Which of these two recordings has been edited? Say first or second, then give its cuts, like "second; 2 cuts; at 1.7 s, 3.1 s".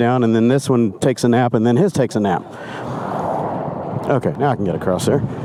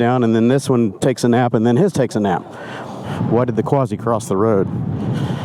second; 1 cut; at 3.0 s